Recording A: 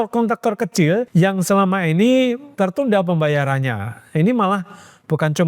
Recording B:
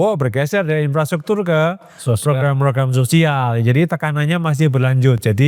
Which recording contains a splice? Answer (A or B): A